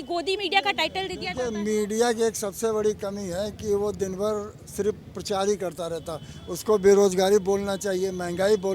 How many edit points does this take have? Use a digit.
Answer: 0